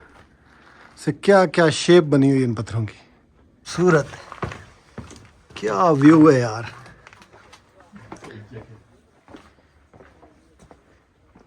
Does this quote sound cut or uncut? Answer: cut